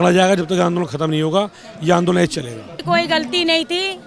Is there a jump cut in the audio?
yes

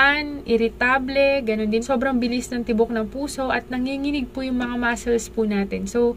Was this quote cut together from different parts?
yes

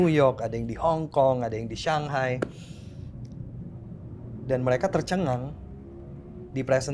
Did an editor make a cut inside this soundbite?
no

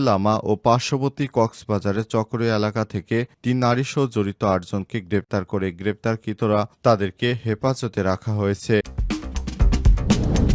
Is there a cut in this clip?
yes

